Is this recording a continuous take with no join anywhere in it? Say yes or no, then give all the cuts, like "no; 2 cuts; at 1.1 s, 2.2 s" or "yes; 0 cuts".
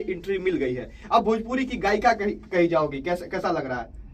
yes; 0 cuts